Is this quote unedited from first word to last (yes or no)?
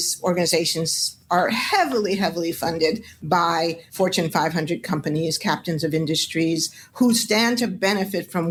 yes